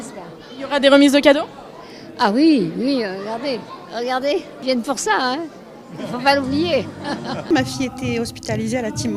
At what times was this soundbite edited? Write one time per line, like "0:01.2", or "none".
0:04.9